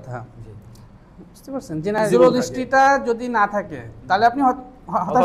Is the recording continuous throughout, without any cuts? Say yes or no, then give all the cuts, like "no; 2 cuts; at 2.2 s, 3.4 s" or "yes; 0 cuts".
no; 1 cut; at 2.1 s